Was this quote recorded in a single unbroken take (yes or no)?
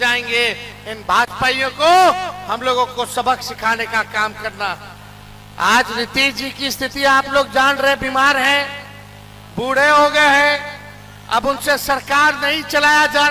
yes